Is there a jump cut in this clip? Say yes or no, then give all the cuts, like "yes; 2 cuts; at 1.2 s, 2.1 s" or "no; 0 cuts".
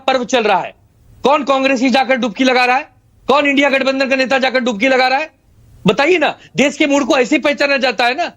no; 0 cuts